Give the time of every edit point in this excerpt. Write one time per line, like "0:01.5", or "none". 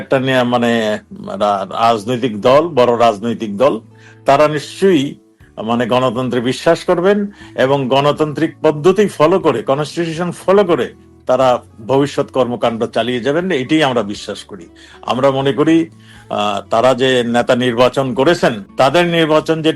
0:18.6